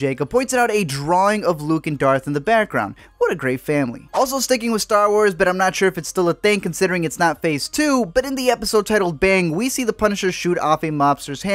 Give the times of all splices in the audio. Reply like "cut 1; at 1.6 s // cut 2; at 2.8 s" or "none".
none